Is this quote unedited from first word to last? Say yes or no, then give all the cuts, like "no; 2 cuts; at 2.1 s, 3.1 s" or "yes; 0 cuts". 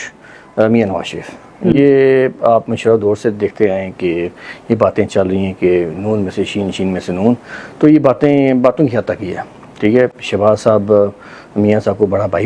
yes; 0 cuts